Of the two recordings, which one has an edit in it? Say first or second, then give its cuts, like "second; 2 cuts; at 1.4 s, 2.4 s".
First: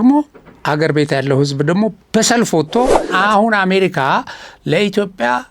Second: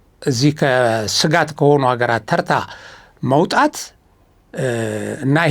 first; 1 cut; at 3.1 s